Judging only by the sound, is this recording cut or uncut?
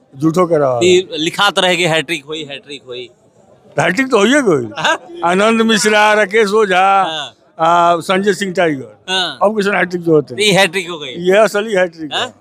uncut